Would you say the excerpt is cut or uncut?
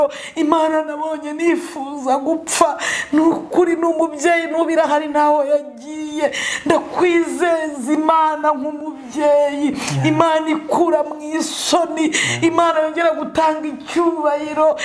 uncut